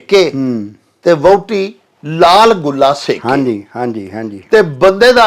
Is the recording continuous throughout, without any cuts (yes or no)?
yes